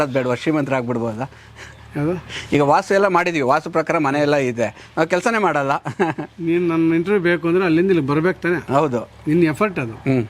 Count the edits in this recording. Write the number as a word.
zero